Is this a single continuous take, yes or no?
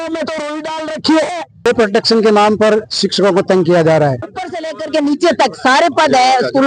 no